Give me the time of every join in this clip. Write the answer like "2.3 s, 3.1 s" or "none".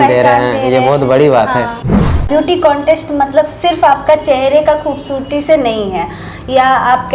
2.3 s